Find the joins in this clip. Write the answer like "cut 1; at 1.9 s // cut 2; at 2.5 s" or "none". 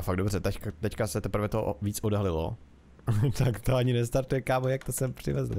cut 1; at 3.0 s